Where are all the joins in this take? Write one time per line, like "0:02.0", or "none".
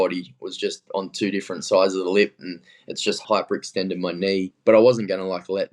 0:03.2
0:04.5